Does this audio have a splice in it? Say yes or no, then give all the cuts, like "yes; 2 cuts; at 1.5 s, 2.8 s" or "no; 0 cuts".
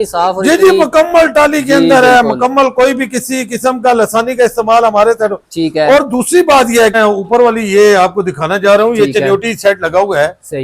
yes; 1 cut; at 6.9 s